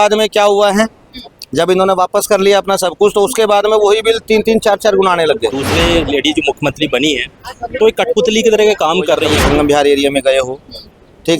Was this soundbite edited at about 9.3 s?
yes; 2 cuts; at 5.7 s, 9.3 s

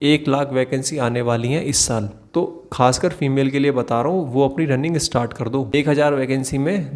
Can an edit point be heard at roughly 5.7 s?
yes; 2 cuts; at 2.2 s, 5.7 s

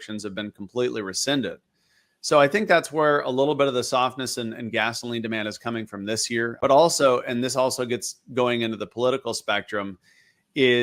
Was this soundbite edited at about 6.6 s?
yes; 1 cut; at 6.6 s

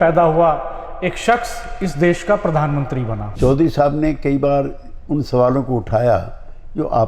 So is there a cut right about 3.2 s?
yes; 1 cut; at 3.2 s

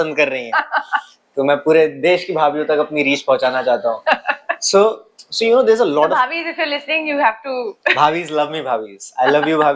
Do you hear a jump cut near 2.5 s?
no; 0 cuts

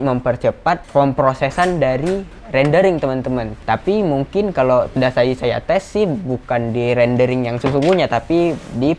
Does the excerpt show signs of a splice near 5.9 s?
no; 3 cuts; at 0.8 s, 3.5 s, 7.6 s

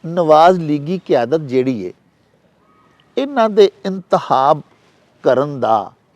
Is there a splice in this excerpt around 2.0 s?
no; 0 cuts

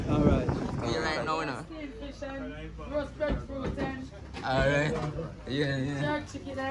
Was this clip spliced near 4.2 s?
no; 1 cut; at 0.9 s

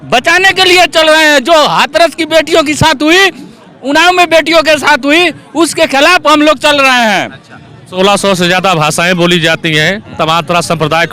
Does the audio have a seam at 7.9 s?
yes; 1 cut; at 7.9 s

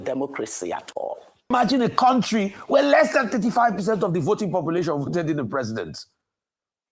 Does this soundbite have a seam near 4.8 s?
no; 1 cut; at 1.5 s

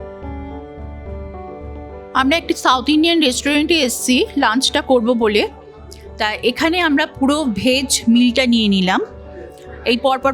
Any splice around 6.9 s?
no; 1 cut; at 2.1 s

